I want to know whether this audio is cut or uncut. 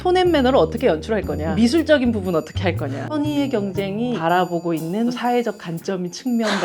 cut